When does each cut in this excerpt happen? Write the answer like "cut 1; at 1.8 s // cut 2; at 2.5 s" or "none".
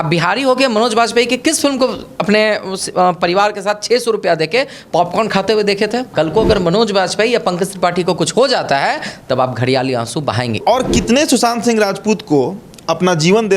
cut 1; at 6.1 s // cut 2; at 10.6 s